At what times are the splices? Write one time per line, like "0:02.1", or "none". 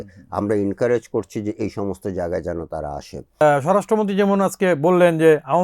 0:03.4